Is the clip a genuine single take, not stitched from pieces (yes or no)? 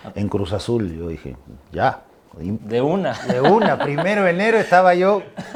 yes